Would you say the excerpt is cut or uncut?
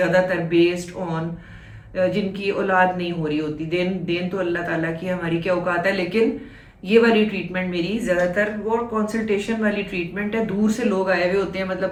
uncut